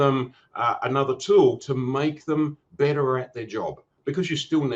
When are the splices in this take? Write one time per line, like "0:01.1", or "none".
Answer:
none